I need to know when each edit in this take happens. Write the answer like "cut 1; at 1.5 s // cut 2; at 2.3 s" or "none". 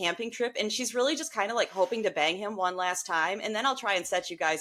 none